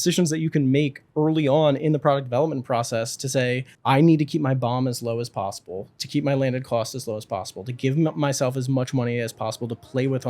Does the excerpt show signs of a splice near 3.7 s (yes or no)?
yes